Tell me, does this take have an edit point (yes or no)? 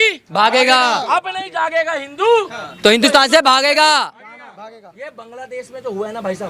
no